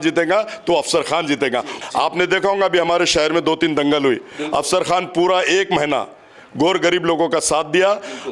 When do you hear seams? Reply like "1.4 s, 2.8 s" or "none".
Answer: 1.8 s

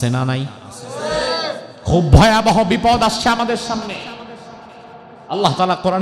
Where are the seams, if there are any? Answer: 1.7 s

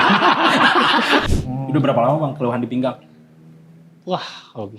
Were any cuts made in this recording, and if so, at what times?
1.3 s

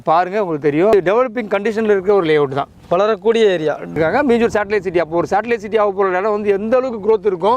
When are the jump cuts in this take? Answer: 0.9 s, 3.9 s

